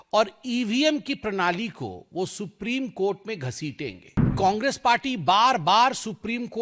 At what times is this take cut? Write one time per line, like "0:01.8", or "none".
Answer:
0:04.3